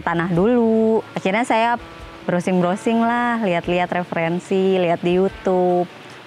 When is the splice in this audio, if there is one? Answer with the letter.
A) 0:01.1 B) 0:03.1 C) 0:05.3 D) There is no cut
A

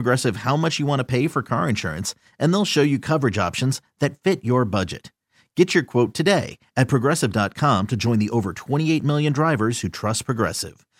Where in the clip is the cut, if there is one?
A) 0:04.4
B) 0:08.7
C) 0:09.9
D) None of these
D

